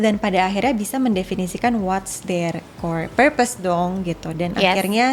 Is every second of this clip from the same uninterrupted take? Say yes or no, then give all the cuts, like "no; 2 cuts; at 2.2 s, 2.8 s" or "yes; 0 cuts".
yes; 0 cuts